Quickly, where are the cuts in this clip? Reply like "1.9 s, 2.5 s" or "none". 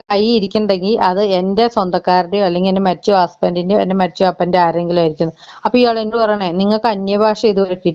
none